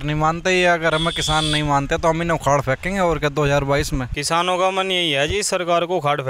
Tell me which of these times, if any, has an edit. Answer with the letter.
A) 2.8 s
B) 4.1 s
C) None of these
B